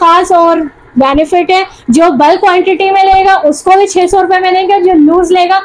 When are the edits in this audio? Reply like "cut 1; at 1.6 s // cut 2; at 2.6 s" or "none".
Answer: none